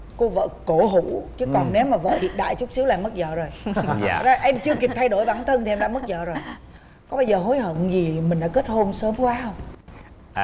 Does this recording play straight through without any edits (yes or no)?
yes